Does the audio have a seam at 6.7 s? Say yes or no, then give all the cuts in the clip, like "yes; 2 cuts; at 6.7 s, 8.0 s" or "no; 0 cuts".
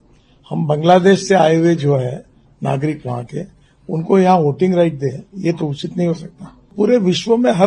yes; 1 cut; at 6.7 s